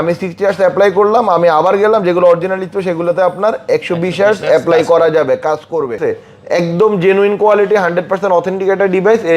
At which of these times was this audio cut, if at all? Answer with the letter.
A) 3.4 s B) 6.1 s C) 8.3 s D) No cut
B